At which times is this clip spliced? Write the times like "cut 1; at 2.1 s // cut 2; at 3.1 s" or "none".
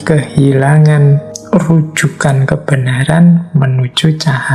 cut 1; at 1.3 s